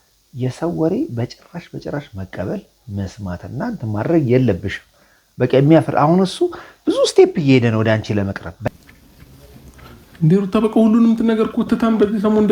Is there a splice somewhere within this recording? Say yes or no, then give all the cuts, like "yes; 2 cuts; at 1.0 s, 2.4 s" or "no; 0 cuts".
yes; 1 cut; at 8.7 s